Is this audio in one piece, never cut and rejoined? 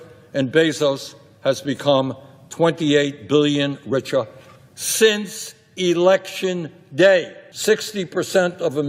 no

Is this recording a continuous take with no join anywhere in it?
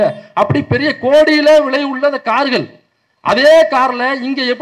yes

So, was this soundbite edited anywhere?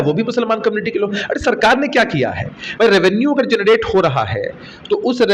no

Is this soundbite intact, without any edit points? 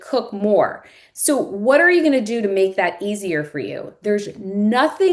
yes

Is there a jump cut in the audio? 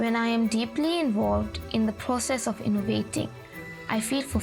no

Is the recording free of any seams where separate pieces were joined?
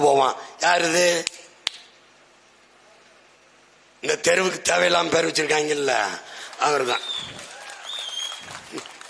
yes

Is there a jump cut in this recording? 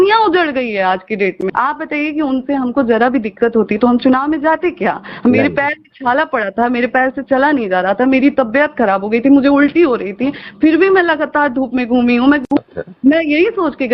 yes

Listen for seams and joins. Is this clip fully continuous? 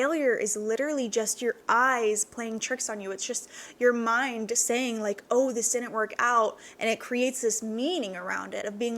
yes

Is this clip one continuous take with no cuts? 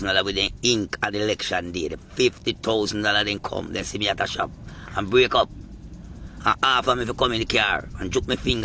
yes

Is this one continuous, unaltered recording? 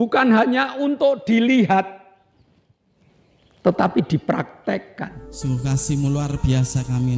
no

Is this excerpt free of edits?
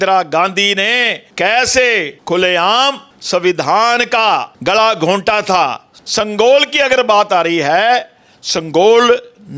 no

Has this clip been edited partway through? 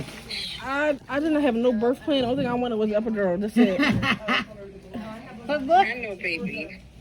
no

